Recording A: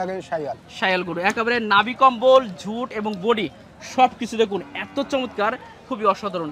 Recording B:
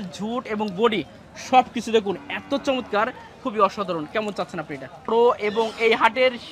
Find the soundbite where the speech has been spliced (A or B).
B